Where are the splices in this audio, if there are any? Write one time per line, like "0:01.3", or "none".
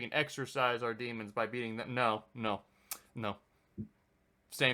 none